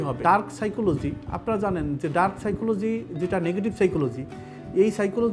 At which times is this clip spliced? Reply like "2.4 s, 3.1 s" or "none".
none